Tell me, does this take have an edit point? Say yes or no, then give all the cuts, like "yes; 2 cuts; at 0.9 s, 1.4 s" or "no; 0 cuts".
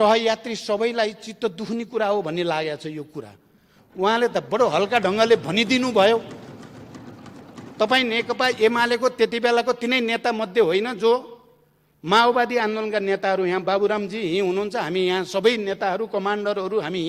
no; 0 cuts